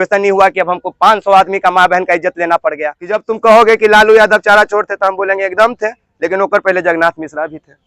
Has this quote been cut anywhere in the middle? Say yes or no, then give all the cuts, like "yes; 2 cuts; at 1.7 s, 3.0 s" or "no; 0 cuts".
yes; 1 cut; at 3.2 s